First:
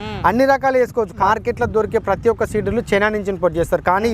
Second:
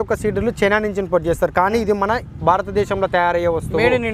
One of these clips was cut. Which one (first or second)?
first